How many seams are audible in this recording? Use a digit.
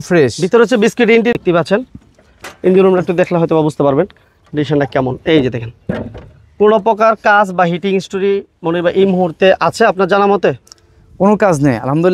1